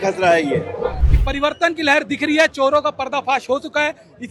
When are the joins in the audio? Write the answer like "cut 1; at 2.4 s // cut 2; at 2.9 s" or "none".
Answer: cut 1; at 1.0 s